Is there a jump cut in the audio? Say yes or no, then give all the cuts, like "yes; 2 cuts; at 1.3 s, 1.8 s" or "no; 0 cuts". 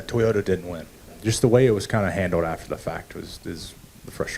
yes; 1 cut; at 1.1 s